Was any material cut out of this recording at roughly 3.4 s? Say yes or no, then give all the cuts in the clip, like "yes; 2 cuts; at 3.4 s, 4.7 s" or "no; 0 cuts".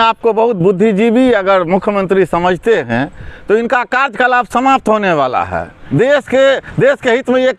no; 1 cut; at 5.7 s